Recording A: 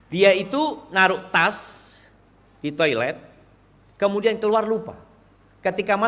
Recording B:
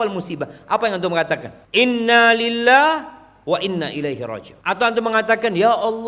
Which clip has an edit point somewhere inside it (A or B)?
B